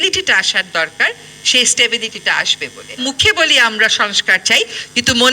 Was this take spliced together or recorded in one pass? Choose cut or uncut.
cut